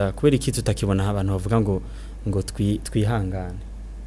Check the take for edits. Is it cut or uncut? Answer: uncut